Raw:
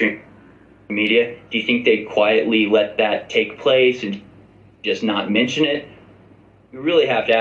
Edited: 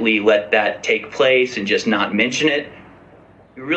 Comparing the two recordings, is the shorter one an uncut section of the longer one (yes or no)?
no